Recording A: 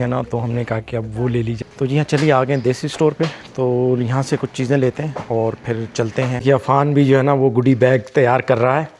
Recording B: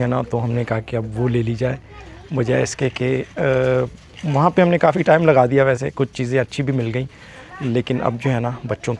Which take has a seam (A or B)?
A